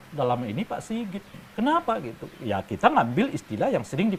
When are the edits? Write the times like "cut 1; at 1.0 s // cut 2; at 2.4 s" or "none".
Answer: none